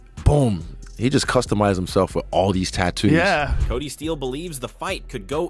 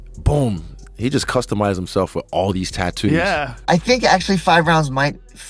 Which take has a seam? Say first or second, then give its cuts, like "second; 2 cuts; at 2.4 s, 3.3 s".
second; 1 cut; at 3.5 s